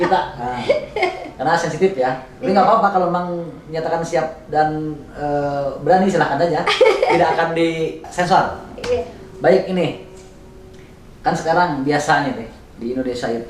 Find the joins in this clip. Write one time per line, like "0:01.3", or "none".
0:08.0

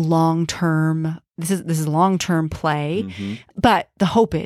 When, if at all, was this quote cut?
0:03.4

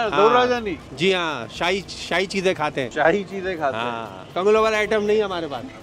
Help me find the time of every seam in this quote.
none

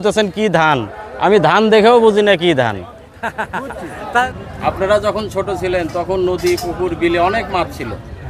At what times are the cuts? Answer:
0:04.2

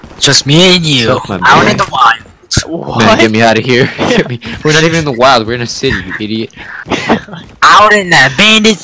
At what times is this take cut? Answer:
none

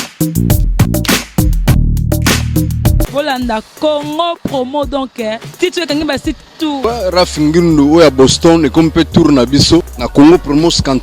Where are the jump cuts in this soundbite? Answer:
0:03.1
0:06.8
0:10.0

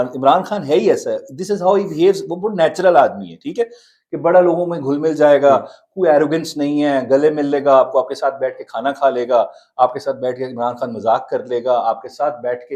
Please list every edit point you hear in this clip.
none

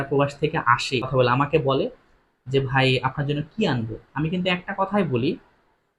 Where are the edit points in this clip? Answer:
0:01.1

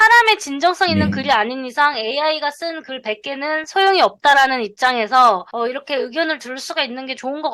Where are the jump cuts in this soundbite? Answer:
none

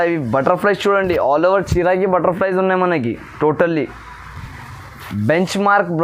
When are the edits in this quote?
none

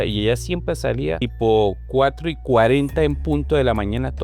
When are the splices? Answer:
0:01.3

